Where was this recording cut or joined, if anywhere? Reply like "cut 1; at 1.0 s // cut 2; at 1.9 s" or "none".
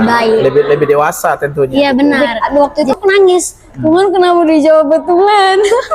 cut 1; at 2.2 s